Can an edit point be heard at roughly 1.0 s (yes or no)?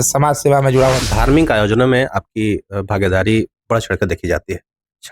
yes